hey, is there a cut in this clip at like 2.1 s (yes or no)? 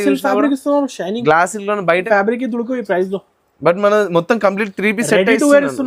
yes